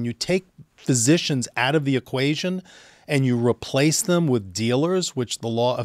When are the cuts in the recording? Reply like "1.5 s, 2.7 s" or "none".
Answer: none